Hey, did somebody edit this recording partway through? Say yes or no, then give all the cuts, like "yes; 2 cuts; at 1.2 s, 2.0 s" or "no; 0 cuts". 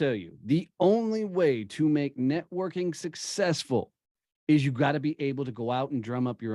no; 0 cuts